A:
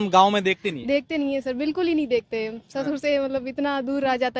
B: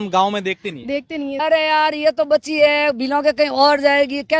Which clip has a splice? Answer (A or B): B